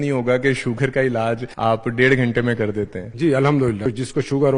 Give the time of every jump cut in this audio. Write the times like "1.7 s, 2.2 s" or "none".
1.5 s, 3.0 s, 3.9 s